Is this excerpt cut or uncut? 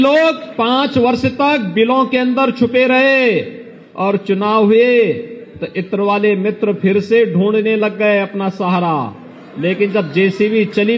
uncut